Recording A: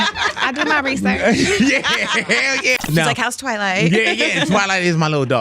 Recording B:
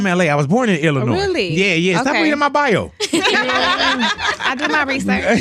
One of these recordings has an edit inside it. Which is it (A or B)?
A